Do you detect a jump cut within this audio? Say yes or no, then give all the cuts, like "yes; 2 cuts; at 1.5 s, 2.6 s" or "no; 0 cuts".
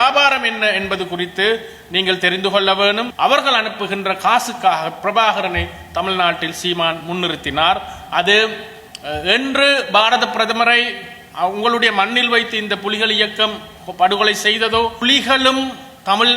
yes; 2 cuts; at 3.1 s, 15.0 s